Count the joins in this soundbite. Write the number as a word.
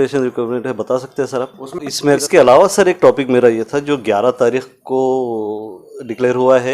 one